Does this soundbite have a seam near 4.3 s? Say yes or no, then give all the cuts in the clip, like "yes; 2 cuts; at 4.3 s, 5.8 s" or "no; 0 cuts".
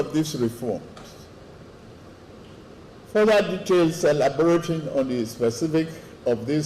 no; 1 cut; at 2.3 s